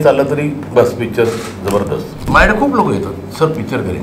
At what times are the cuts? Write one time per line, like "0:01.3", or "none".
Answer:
0:02.3